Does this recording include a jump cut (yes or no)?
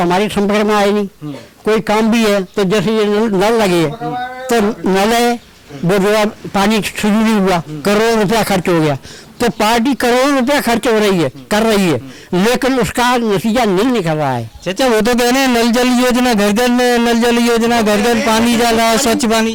no